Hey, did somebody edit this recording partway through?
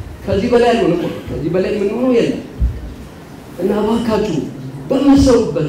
no; 0 cuts

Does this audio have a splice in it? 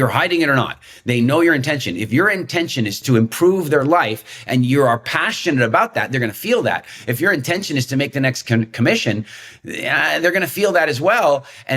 yes; 1 cut; at 3.0 s

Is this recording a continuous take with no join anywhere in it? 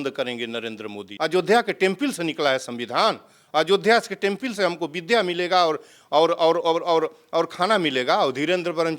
no; 1 cut; at 1.1 s

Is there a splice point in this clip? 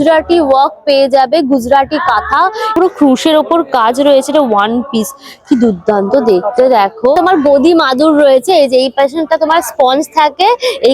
yes; 2 cuts; at 2.7 s, 7.2 s

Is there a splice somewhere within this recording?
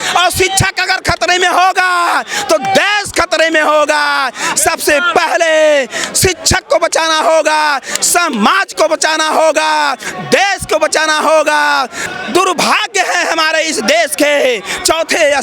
yes; 1 cut; at 12.0 s

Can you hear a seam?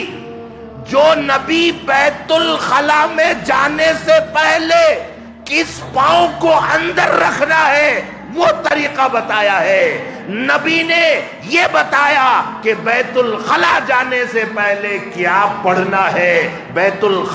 no; 0 cuts

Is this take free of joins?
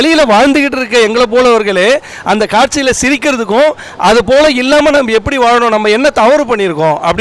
yes; 0 cuts

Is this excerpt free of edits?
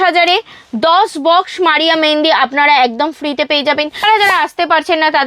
no; 1 cut; at 4.0 s

